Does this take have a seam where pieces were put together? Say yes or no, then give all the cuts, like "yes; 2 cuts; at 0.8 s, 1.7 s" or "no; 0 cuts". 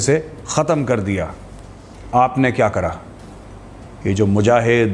no; 0 cuts